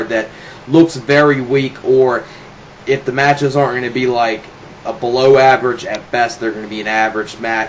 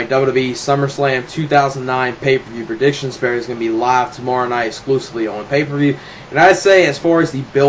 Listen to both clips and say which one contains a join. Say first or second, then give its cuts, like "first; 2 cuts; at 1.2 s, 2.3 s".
first; 1 cut; at 6.6 s